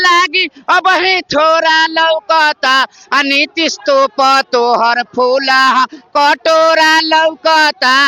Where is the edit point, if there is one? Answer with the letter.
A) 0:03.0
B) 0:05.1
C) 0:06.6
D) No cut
D